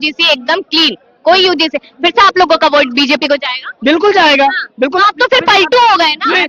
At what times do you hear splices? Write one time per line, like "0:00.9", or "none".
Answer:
none